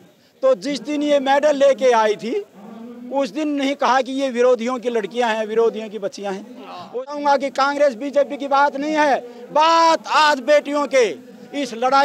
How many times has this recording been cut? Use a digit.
1